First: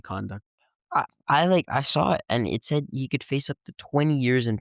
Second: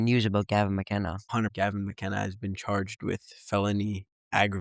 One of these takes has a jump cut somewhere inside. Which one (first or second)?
second